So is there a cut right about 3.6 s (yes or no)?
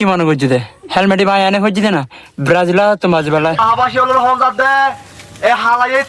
yes